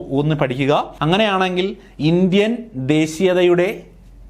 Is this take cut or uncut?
cut